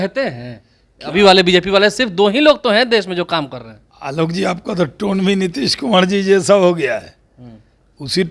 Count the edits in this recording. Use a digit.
0